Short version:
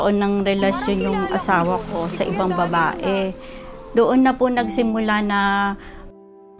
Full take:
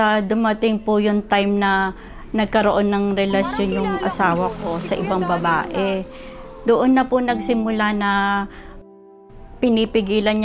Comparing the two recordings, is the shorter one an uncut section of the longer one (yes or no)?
yes